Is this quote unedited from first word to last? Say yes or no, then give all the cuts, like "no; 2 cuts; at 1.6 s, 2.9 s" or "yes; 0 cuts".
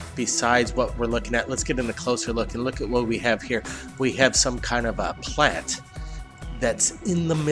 no; 1 cut; at 4.4 s